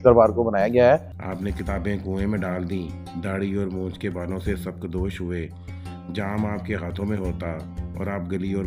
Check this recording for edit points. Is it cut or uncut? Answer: cut